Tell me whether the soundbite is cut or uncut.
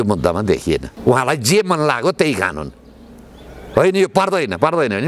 cut